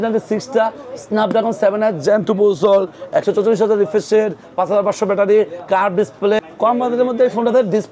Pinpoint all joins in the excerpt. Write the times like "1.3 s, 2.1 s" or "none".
6.4 s